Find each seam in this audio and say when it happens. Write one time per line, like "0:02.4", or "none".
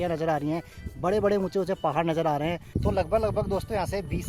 0:02.7